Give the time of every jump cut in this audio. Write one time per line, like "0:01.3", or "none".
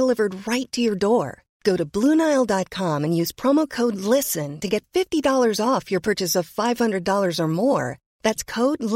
none